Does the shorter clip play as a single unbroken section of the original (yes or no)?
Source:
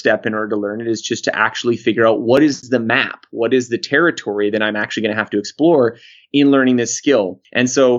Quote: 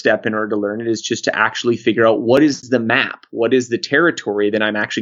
yes